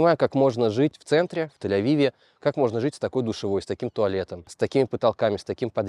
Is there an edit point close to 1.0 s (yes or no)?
yes